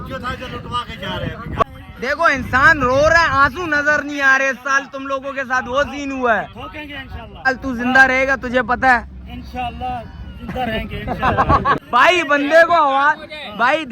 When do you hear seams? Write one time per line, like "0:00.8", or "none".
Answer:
0:01.6
0:07.5
0:11.8